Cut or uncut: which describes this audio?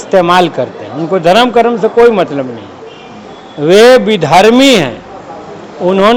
uncut